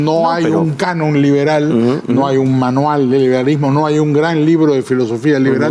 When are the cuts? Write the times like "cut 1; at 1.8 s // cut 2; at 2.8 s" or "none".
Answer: none